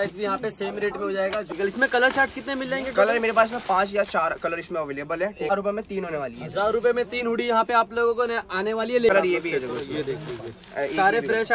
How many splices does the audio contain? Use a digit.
3